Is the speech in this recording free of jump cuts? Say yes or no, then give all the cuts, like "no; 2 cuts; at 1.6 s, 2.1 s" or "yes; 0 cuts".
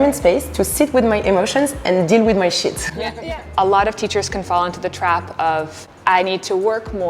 no; 1 cut; at 3.0 s